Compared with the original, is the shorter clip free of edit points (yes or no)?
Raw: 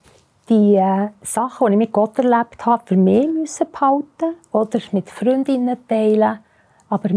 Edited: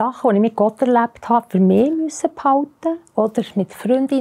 yes